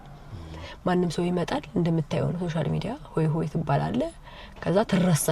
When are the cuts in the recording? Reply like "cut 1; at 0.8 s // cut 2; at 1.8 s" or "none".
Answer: none